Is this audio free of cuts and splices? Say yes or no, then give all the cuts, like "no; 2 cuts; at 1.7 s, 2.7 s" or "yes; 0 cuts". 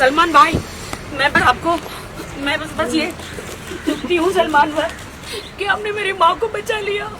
no; 1 cut; at 1.3 s